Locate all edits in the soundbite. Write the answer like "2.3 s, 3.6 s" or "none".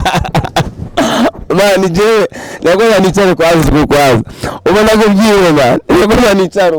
none